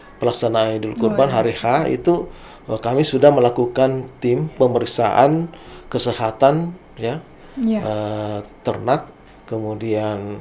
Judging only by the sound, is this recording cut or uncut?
uncut